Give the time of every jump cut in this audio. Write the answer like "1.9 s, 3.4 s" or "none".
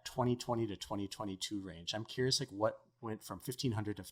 none